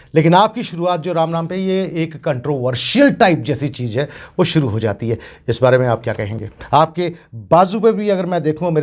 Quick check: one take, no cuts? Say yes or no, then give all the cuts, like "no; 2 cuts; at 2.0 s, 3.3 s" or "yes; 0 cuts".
yes; 0 cuts